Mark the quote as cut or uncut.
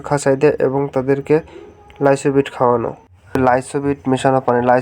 cut